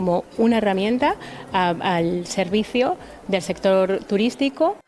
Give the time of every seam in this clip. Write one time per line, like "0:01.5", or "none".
none

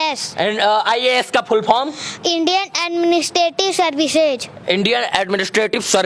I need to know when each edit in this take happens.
none

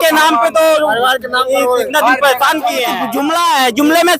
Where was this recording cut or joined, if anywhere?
0:03.0

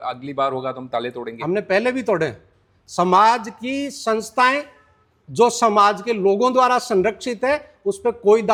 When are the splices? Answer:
none

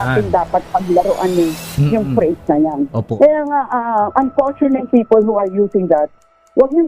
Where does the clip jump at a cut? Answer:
0:03.0

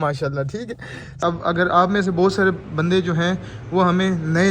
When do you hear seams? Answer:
0:01.2

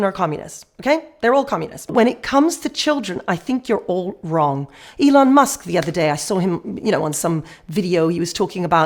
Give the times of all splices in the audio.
0:01.9

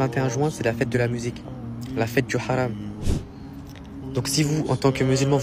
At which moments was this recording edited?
0:03.1

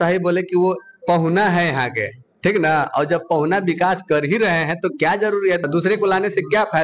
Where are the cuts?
none

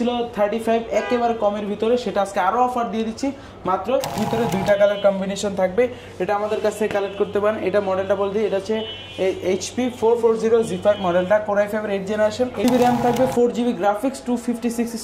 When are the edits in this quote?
0:04.2
0:12.6

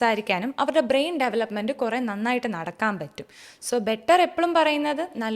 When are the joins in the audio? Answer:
none

